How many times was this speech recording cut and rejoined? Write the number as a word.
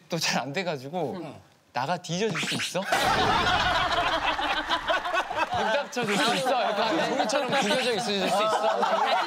one